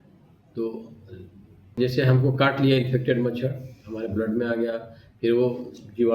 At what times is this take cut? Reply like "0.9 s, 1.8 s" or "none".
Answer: 1.7 s